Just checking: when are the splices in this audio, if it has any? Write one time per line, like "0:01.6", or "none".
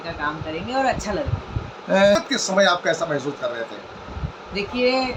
none